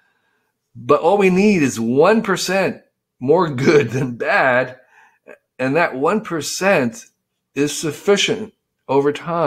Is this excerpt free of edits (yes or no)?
yes